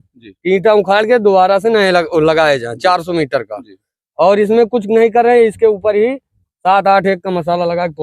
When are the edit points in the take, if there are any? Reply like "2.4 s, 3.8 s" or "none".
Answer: none